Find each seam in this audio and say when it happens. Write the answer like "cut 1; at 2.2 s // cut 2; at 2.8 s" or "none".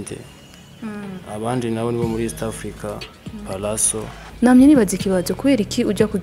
cut 1; at 4.2 s